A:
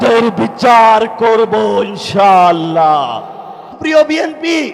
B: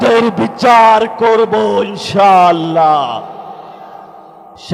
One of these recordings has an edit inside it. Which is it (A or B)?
A